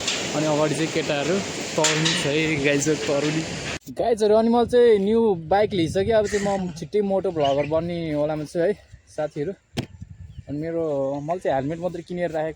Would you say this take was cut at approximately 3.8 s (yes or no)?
yes